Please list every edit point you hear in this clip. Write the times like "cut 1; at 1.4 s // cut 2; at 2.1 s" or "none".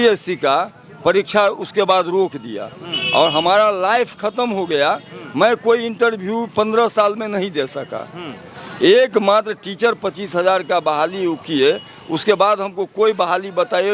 none